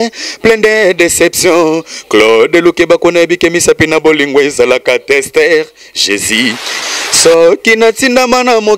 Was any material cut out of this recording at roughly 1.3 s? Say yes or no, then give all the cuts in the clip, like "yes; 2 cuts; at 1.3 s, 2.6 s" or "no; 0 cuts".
no; 1 cut; at 6.8 s